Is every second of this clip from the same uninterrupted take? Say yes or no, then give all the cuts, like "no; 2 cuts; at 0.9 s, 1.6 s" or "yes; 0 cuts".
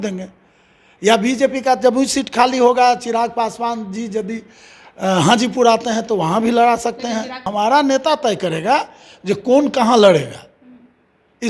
no; 1 cut; at 7.4 s